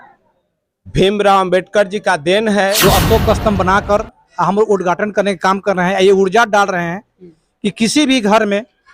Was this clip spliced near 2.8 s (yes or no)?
yes